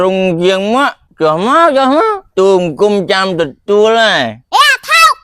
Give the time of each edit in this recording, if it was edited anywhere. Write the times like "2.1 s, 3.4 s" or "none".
1.0 s, 2.2 s, 4.4 s